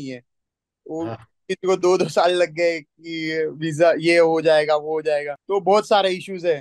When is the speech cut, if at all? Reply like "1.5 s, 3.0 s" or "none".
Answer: 5.4 s